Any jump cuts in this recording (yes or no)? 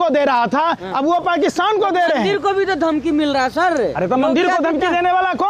no